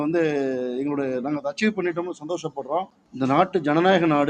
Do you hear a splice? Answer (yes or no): yes